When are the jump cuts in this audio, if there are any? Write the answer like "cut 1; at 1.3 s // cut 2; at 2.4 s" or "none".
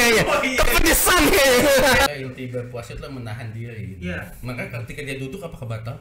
cut 1; at 2.1 s